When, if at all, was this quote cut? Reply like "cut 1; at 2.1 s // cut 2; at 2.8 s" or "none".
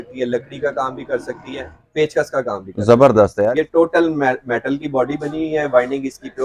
cut 1; at 1.8 s // cut 2; at 3.4 s

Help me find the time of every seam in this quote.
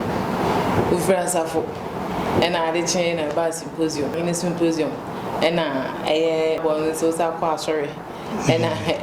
cut 1; at 4.2 s // cut 2; at 6.6 s

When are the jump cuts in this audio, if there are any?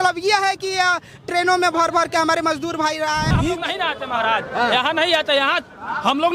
cut 1; at 3.4 s

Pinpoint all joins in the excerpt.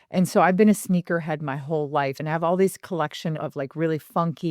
cut 1; at 2.2 s // cut 2; at 3.3 s

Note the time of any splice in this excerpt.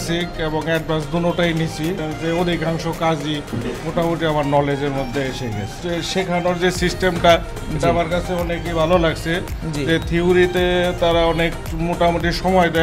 cut 1; at 2.0 s // cut 2; at 5.7 s

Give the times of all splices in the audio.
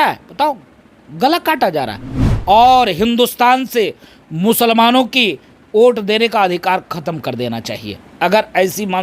cut 1; at 2.3 s

